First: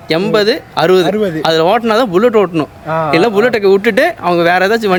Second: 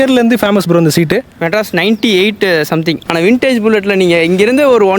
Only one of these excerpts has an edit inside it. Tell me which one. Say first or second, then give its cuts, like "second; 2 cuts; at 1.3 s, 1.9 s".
second; 1 cut; at 3.0 s